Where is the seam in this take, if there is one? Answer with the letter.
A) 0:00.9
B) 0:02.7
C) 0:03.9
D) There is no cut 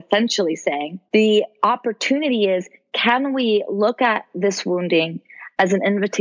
A